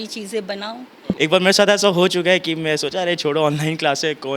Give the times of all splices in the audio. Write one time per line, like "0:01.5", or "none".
0:01.2